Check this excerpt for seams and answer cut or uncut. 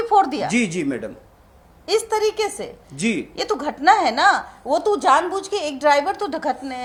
uncut